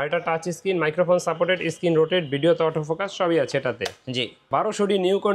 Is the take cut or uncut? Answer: cut